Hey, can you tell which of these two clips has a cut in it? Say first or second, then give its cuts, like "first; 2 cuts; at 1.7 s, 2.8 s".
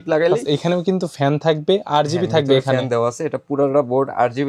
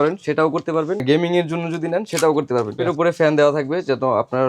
second; 2 cuts; at 1.0 s, 2.8 s